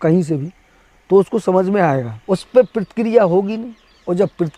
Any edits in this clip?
yes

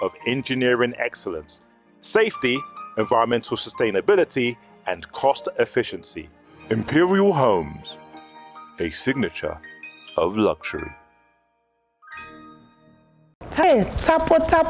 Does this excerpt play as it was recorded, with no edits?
no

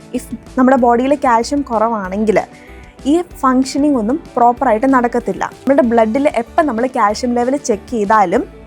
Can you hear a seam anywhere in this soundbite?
yes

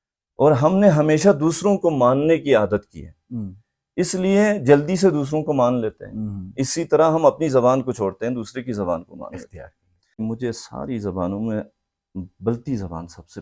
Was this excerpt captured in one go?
no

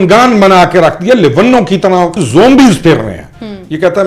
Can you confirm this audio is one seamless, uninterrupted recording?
no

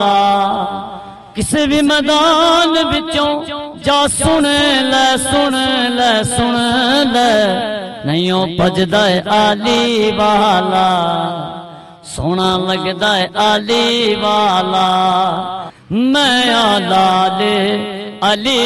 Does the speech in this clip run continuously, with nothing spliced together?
yes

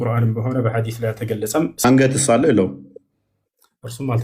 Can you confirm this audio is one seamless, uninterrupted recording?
no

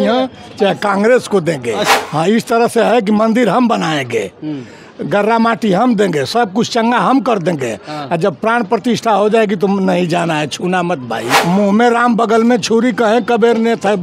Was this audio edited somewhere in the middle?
yes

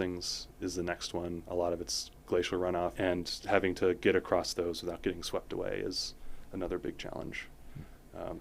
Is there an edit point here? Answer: yes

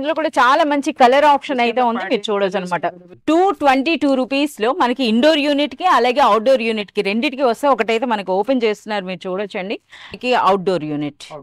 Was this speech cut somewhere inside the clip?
yes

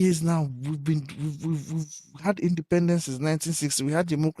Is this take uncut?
yes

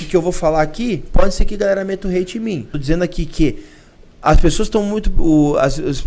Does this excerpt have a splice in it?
yes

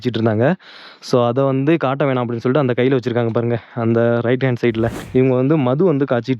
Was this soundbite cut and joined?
yes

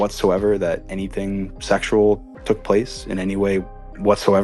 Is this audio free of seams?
no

